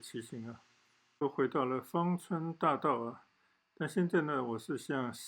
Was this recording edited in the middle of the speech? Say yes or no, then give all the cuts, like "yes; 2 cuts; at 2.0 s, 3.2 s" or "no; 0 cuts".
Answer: yes; 1 cut; at 1.2 s